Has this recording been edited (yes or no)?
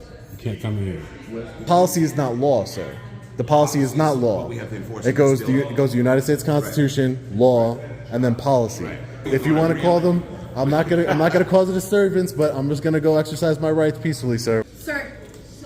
yes